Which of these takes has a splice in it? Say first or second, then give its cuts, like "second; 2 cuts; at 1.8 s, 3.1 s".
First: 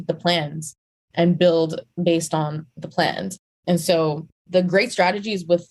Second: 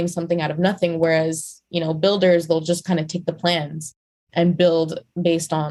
first; 2 cuts; at 3.4 s, 4.3 s